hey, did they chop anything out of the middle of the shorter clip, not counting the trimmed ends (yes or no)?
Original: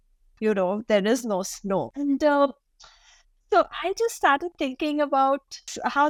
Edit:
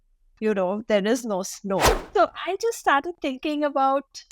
yes